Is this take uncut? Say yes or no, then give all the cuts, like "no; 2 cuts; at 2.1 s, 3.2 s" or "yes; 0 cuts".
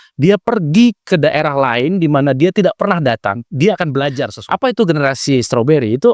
no; 1 cut; at 4.3 s